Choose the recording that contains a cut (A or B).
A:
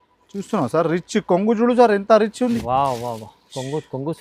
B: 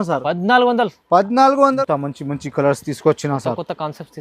B